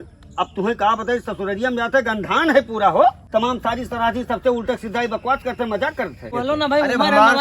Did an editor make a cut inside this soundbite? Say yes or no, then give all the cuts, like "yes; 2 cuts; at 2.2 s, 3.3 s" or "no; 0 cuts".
yes; 2 cuts; at 3.2 s, 6.3 s